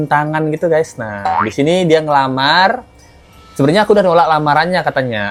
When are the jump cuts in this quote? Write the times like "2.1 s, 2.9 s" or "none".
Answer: none